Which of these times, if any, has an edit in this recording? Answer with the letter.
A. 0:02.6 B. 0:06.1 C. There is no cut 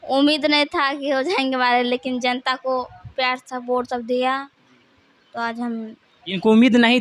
C